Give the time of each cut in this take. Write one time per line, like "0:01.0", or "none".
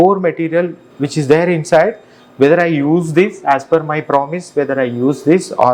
none